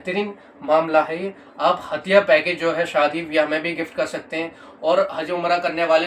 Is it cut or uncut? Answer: uncut